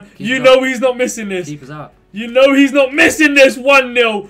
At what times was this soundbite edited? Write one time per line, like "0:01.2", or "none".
none